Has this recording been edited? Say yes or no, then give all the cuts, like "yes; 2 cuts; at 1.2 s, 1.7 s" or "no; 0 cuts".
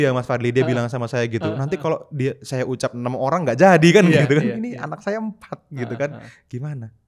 no; 0 cuts